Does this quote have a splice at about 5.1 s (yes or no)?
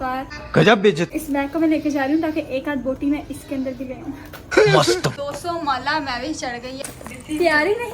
yes